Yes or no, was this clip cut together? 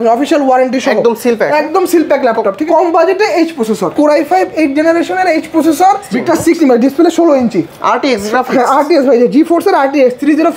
yes